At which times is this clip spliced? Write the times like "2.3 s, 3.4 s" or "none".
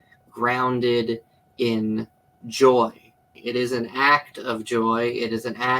3.3 s